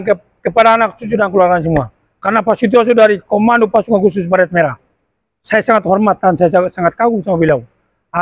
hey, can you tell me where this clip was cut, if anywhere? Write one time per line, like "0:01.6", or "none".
none